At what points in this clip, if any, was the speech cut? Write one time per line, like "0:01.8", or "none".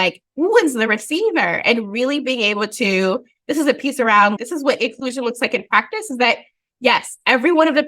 0:04.4